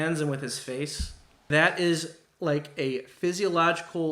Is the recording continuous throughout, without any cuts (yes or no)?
no